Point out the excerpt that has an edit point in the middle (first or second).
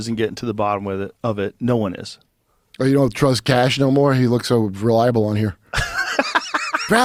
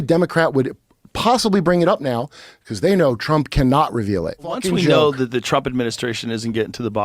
second